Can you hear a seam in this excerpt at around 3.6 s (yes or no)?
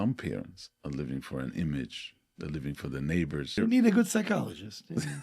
yes